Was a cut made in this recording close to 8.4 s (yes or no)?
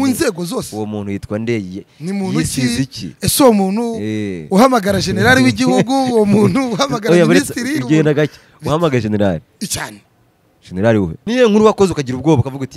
no